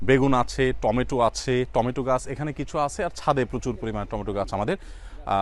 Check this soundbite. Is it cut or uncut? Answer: uncut